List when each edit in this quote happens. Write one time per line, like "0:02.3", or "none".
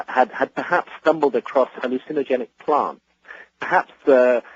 0:02.1

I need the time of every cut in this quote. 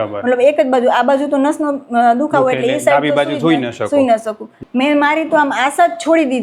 0:04.6

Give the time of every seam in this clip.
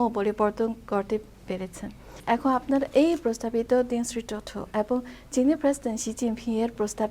0:02.1

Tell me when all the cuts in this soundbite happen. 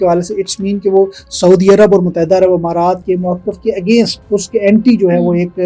0:03.0
0:04.2

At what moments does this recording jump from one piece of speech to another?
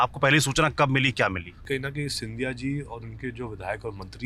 0:01.6

